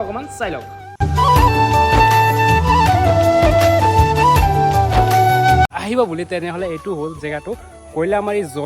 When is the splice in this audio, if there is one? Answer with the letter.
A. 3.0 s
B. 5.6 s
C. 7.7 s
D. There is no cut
B